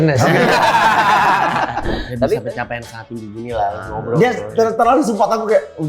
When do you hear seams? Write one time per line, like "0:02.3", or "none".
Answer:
0:02.4